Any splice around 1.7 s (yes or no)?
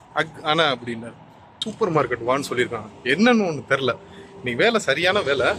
yes